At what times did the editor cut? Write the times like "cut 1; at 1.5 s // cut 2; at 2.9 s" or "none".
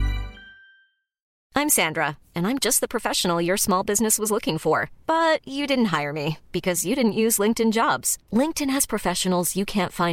cut 1; at 1.3 s